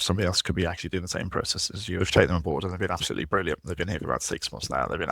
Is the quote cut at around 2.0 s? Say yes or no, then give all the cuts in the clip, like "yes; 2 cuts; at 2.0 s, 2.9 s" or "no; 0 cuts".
yes; 1 cut; at 2.0 s